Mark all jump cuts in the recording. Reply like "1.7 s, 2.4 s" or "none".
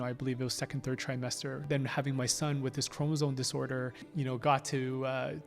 1.6 s, 4.0 s